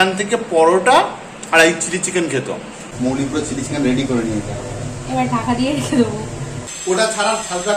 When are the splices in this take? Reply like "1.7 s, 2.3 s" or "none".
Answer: 2.8 s, 6.7 s